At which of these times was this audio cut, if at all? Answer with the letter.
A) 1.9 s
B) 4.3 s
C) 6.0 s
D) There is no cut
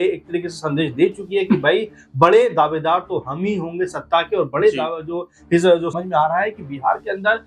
C